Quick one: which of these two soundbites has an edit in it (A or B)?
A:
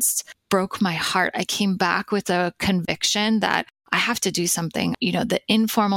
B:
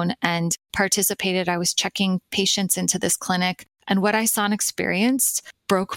A